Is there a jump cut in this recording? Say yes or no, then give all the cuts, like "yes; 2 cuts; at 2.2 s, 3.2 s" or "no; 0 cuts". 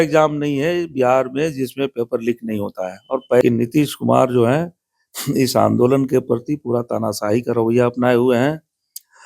yes; 1 cut; at 3.4 s